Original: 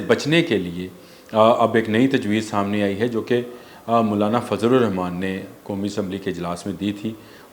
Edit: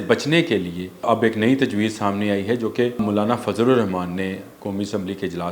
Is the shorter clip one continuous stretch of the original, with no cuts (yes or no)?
no